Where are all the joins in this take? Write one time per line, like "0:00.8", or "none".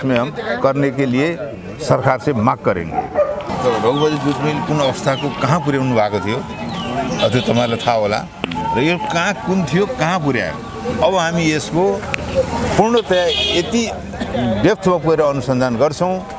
0:03.5